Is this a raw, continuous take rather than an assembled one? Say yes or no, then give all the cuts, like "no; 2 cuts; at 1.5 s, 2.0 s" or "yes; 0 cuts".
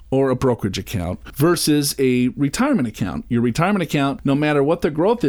no; 1 cut; at 4.2 s